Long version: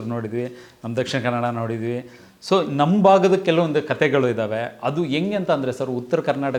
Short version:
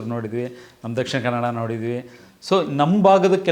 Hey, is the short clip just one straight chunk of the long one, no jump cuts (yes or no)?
yes